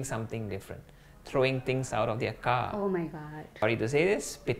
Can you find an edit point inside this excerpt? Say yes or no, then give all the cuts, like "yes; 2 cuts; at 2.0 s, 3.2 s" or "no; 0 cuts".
yes; 1 cut; at 3.6 s